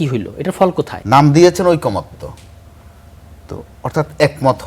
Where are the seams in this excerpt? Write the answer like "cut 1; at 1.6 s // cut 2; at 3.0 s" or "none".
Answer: cut 1; at 1.0 s